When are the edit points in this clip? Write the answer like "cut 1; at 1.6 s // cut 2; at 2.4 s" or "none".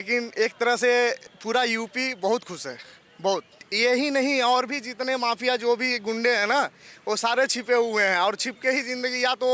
cut 1; at 1.3 s // cut 2; at 3.6 s